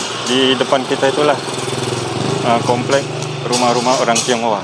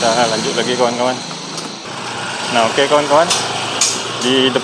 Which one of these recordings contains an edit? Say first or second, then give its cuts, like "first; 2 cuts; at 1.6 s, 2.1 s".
second; 1 cut; at 1.8 s